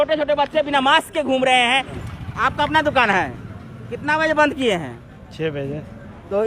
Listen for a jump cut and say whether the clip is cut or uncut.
cut